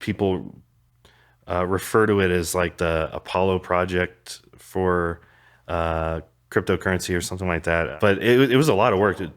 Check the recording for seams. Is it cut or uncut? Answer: cut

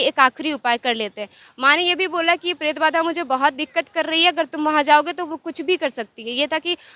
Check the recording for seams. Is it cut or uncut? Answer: uncut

